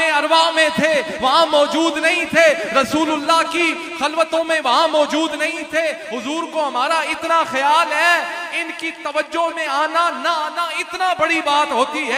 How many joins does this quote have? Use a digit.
0